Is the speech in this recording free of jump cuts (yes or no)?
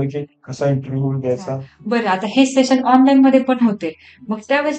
no